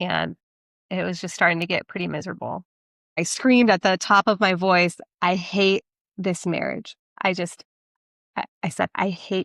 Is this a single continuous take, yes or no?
no